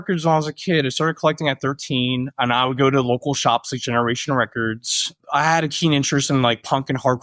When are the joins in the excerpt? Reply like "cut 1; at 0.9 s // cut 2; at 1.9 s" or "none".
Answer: cut 1; at 5.1 s